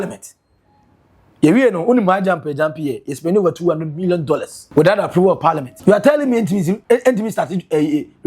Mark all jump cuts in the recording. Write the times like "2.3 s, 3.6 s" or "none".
4.6 s, 5.7 s, 6.8 s